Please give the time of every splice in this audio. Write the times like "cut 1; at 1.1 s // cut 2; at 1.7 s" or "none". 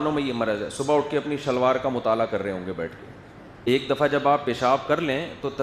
cut 1; at 3.7 s